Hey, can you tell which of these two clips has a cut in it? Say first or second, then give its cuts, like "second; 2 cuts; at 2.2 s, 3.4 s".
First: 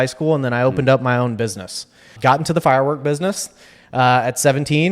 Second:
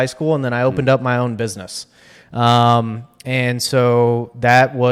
first; 1 cut; at 2.1 s